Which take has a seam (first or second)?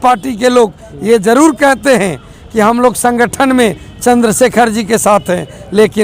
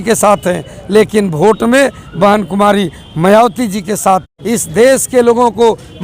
second